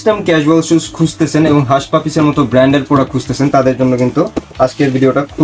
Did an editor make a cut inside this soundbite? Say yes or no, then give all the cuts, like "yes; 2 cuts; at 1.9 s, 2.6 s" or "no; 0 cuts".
no; 0 cuts